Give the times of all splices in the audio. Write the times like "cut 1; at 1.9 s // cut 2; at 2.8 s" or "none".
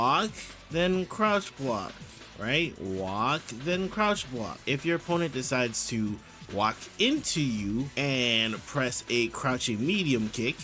cut 1; at 4.6 s // cut 2; at 7.9 s